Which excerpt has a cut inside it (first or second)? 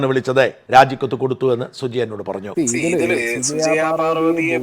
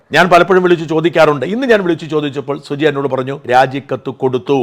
first